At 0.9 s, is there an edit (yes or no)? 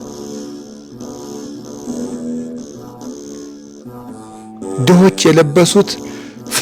no